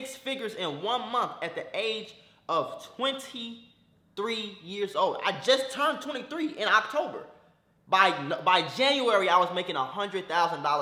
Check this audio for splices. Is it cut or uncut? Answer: uncut